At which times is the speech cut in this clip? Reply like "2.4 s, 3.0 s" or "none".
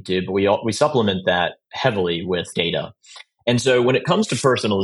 2.5 s